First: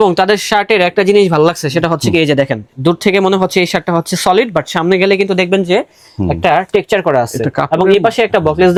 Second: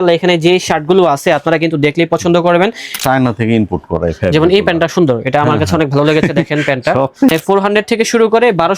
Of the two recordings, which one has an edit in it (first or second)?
second